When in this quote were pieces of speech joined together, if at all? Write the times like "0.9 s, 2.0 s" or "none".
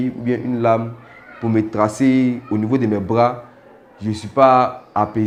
none